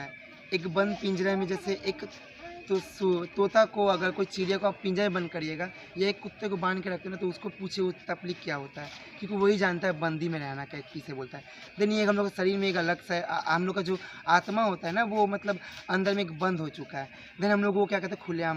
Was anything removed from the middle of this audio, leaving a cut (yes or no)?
no